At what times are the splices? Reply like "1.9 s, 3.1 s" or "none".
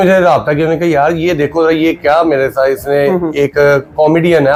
none